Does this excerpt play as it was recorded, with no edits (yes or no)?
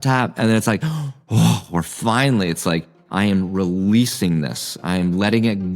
no